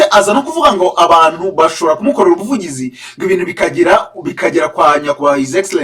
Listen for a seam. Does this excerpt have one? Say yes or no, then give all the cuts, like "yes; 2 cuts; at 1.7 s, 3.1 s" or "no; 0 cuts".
no; 0 cuts